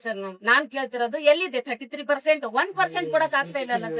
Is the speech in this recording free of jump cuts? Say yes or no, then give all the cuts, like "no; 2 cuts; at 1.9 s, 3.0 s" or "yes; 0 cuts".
yes; 0 cuts